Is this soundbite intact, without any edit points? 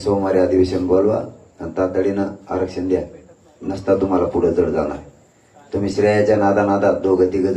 yes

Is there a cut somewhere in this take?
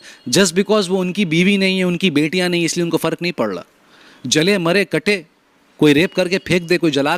no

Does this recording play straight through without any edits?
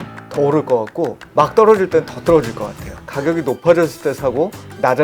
no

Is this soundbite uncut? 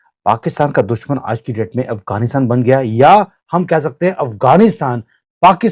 yes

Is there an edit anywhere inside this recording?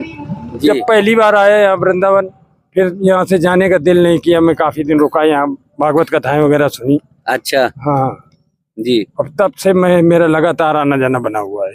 no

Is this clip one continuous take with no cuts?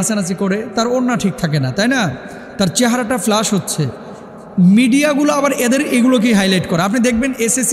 yes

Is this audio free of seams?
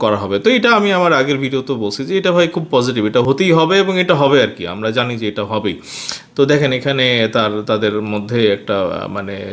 yes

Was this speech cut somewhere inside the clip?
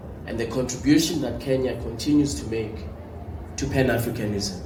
no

